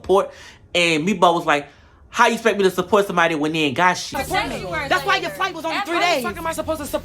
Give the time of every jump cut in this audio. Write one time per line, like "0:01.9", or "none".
0:04.0